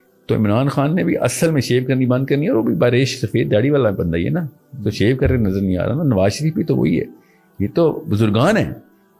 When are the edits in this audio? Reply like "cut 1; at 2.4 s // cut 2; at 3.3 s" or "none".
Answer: none